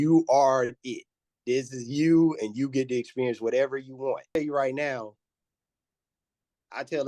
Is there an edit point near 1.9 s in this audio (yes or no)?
no